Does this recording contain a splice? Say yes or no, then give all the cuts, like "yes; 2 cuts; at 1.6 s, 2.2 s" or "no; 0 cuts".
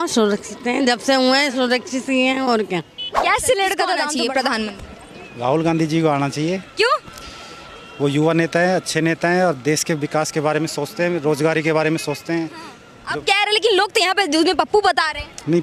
yes; 1 cut; at 4.1 s